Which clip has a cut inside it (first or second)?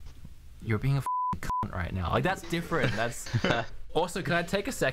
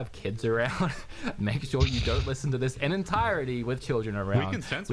first